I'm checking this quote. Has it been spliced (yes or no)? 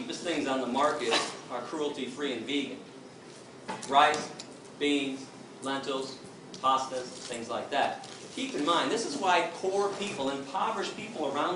yes